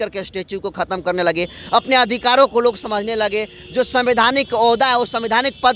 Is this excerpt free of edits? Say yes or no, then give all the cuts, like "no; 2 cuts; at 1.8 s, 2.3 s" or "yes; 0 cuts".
yes; 0 cuts